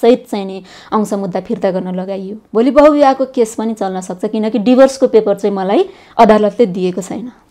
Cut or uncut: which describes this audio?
cut